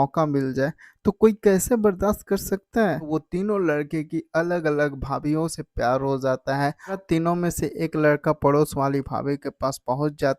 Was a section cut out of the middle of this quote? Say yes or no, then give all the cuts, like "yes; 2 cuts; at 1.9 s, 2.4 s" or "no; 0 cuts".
yes; 2 cuts; at 3.1 s, 7.0 s